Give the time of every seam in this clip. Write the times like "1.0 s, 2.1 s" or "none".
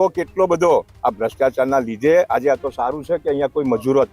0.9 s